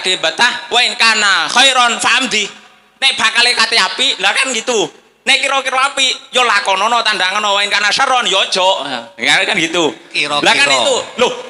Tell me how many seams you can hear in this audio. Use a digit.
0